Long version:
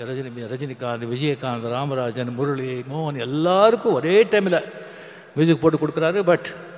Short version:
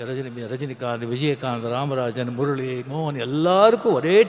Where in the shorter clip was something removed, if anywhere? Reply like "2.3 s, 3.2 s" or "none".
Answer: none